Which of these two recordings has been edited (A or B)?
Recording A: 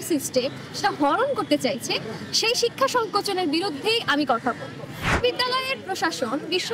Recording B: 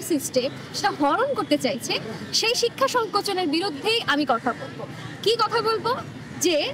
A